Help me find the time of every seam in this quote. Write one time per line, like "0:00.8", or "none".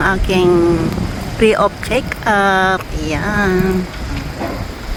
none